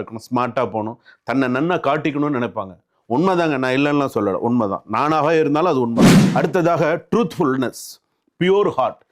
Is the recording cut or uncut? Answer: cut